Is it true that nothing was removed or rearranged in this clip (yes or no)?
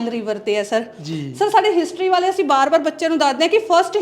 yes